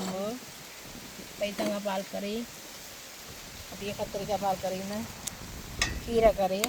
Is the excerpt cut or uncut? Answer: uncut